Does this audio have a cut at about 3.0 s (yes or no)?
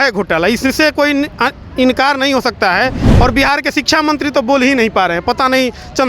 yes